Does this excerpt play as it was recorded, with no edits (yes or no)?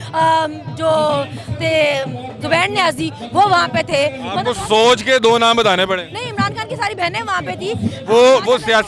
yes